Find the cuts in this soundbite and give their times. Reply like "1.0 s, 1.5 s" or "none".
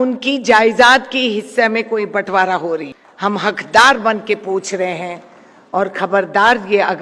3.0 s